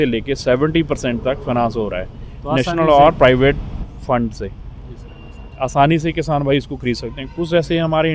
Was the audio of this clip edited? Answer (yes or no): no